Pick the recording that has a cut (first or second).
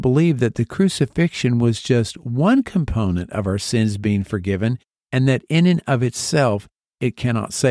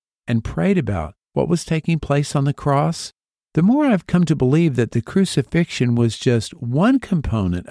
second